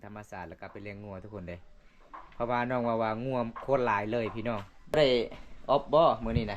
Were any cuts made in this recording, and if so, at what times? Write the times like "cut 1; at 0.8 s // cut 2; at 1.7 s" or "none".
cut 1; at 4.9 s